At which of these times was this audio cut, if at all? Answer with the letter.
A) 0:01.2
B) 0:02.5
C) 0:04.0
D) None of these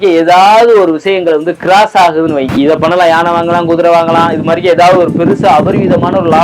B